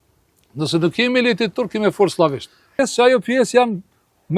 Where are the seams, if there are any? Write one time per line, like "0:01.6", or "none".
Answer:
0:02.8